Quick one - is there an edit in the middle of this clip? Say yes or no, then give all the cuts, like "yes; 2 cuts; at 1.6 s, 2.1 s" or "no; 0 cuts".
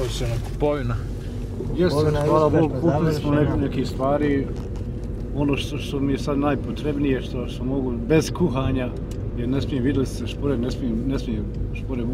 no; 0 cuts